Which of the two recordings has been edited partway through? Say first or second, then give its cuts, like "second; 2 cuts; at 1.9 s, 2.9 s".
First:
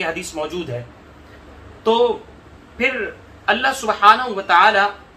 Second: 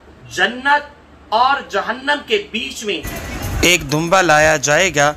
second; 1 cut; at 3.1 s